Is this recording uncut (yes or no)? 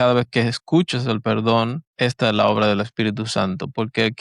no